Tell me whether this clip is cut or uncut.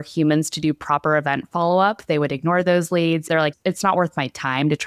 cut